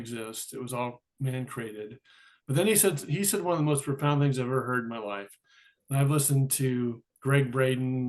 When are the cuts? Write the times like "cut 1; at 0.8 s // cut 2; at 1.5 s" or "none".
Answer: cut 1; at 1.1 s // cut 2; at 7.1 s